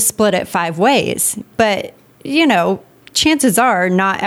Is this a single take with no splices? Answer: no; 1 cut; at 1.5 s

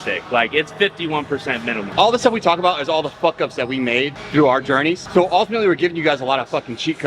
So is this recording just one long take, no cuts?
no; 2 cuts; at 1.9 s, 5.0 s

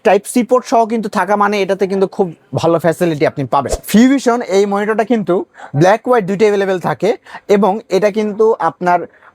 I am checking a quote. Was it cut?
yes; 1 cut; at 3.8 s

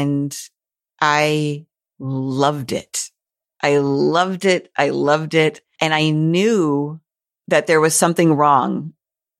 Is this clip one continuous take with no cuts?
no; 1 cut; at 5.7 s

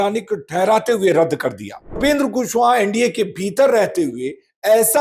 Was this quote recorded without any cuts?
no; 1 cut; at 2.0 s

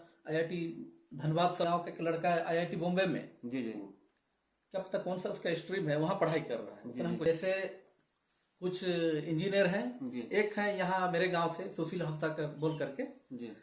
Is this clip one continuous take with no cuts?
no; 2 cuts; at 1.6 s, 7.2 s

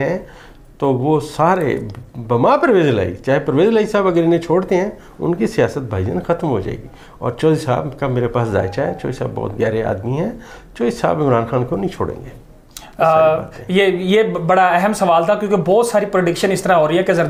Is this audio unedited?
yes; 0 cuts

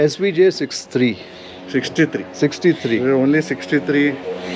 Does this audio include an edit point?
no; 0 cuts

